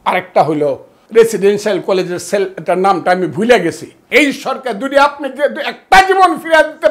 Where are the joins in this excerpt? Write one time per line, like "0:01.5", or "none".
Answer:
0:00.9
0:03.9